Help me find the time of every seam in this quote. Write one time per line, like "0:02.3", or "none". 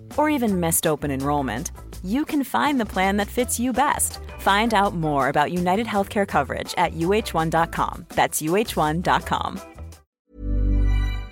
0:10.2